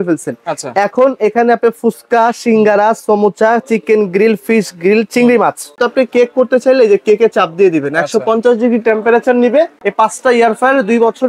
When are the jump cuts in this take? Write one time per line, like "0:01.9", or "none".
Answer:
0:05.8
0:09.8

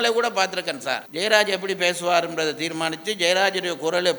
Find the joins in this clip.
0:01.1

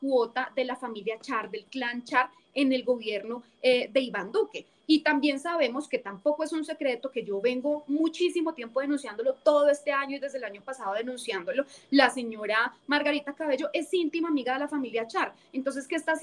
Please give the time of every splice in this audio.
none

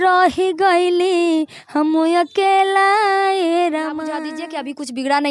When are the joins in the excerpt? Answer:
0:04.3

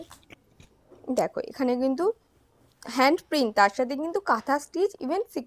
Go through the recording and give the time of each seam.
none

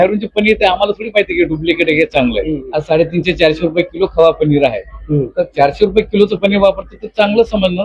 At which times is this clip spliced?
0:02.7

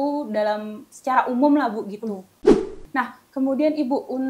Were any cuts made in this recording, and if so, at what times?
0:02.3

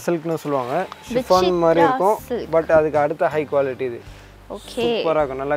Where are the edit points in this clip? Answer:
none

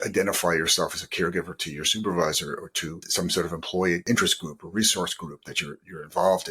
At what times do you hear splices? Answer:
0:03.0
0:04.0

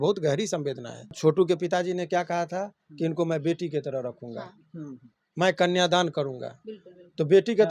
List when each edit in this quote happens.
0:01.2

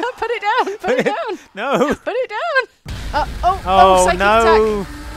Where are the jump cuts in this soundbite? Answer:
0:03.0

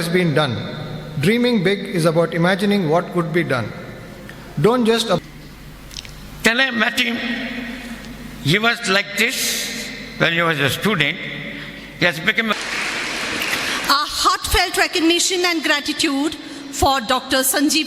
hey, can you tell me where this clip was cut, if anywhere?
0:05.2
0:12.5

